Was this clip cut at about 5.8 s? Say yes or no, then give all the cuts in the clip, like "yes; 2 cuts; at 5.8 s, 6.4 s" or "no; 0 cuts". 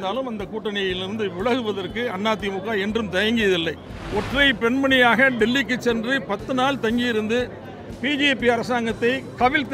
no; 1 cut; at 3.9 s